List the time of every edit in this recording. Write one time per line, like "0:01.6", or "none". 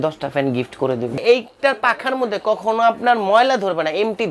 0:01.2

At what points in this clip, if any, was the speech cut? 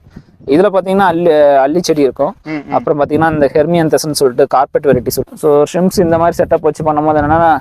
0:05.2

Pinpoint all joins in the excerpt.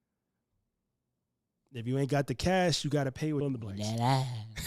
0:03.4

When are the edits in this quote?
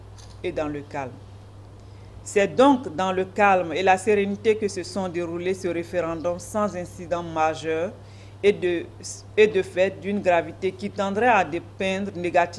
none

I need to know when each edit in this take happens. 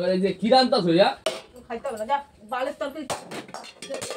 0:01.2

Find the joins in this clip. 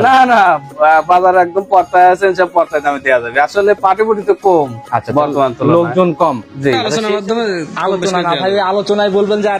0:06.9

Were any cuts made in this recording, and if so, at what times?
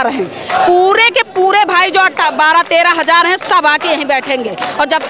none

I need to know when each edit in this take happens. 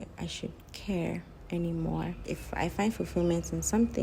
0:02.2

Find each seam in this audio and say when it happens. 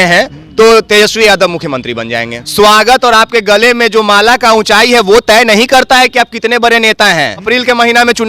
0:02.4
0:07.5

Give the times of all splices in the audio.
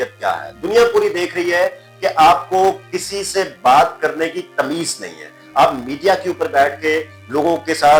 none

